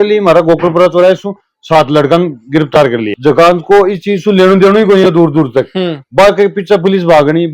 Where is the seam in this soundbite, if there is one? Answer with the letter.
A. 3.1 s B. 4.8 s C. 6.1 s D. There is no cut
A